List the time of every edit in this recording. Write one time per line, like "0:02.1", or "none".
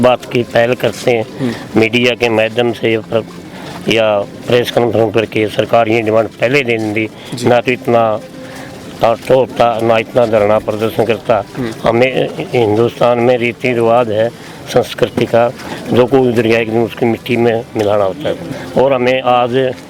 0:18.5

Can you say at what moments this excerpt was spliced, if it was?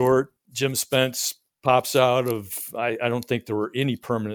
none

